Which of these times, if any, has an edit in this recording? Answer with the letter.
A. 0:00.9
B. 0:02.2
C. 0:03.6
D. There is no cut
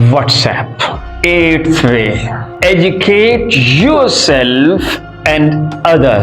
A